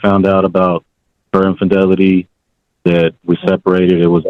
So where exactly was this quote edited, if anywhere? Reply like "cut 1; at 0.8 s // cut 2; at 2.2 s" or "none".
none